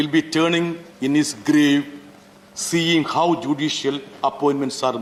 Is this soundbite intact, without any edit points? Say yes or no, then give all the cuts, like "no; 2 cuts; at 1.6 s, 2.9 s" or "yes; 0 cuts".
yes; 0 cuts